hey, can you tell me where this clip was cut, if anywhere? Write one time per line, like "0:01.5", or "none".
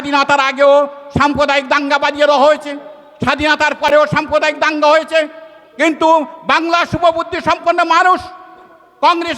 none